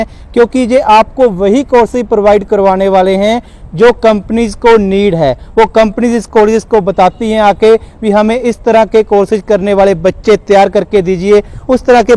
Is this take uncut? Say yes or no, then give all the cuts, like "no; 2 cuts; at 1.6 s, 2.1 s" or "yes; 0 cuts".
yes; 0 cuts